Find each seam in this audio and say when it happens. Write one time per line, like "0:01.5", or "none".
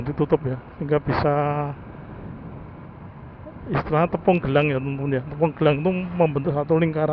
none